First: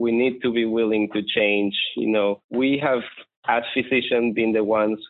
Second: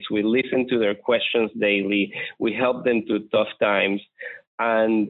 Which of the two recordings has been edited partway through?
first; 1 cut; at 2.4 s

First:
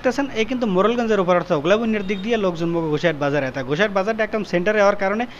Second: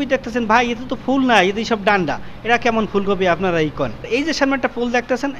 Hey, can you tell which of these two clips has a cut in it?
second; 1 cut; at 4.0 s

